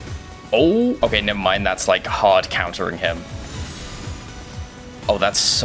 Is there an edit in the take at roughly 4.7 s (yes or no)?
no